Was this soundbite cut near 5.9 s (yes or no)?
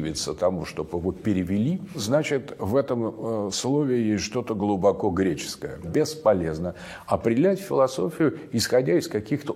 yes